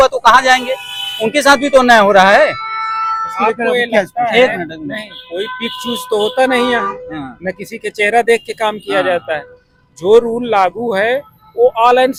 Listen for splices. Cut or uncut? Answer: uncut